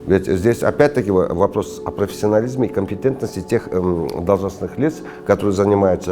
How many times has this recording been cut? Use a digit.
0